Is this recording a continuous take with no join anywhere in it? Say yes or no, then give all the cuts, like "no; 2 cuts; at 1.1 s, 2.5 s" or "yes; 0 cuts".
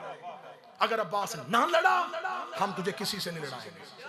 yes; 0 cuts